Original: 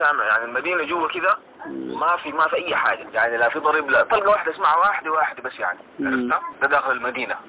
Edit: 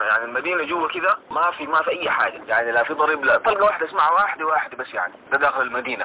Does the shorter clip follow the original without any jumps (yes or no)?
no